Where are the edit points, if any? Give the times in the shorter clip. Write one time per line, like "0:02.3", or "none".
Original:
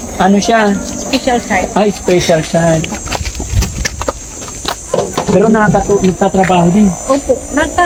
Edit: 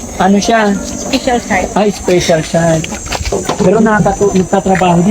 0:03.3